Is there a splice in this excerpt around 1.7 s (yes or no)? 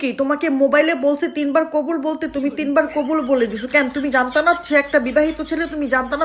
no